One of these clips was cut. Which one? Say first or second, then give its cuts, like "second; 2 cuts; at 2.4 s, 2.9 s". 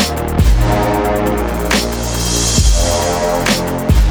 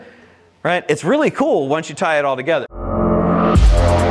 second; 1 cut; at 2.8 s